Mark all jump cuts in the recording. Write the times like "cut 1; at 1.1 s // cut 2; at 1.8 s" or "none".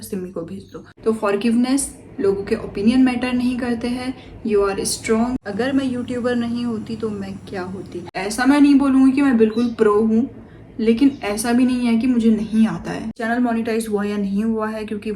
cut 1; at 0.9 s // cut 2; at 5.3 s // cut 3; at 8.0 s // cut 4; at 13.2 s